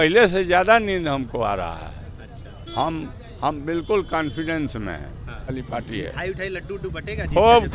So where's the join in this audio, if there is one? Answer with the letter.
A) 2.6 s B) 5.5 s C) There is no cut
B